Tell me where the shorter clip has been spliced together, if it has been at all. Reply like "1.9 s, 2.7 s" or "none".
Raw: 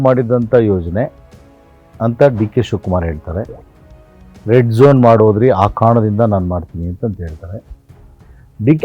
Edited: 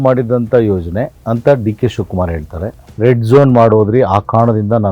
1.2 s, 2.8 s